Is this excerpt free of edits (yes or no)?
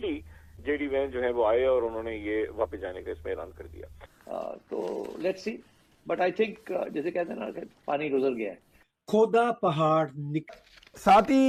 yes